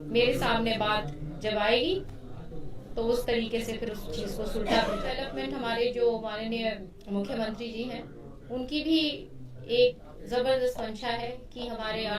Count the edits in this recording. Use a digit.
2